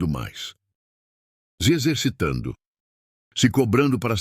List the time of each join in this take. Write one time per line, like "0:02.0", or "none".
none